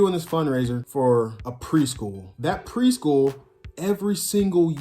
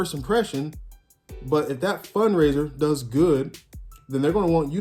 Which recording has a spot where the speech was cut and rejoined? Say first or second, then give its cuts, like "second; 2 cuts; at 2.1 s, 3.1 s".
first; 2 cuts; at 1.1 s, 2.2 s